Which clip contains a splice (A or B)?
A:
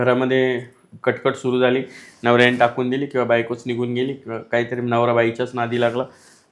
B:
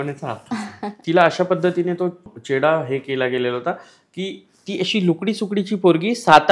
B